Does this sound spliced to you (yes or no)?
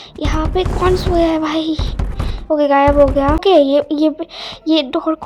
yes